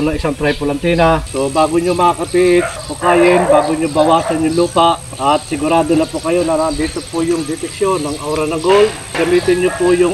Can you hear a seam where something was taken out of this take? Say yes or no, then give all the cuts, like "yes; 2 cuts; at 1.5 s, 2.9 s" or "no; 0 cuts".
yes; 4 cuts; at 1.3 s, 2.8 s, 5.1 s, 9.2 s